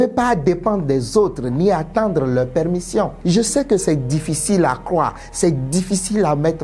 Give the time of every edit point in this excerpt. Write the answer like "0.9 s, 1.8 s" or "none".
3.2 s